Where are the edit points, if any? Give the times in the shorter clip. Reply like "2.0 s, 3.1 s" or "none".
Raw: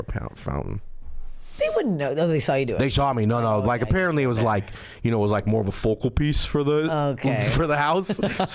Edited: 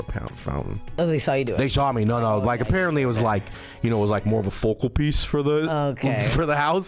1.0 s